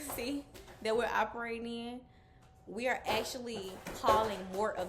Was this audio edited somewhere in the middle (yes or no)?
no